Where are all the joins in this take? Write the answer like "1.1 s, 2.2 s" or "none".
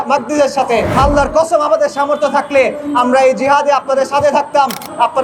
0.9 s